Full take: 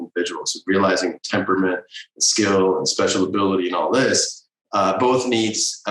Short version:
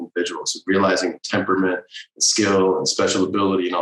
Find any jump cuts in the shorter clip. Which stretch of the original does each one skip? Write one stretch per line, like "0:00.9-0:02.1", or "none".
none